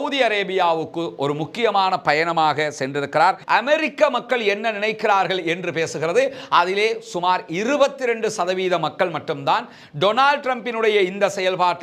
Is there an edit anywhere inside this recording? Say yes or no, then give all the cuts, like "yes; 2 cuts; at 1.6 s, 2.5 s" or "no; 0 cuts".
yes; 1 cut; at 3.4 s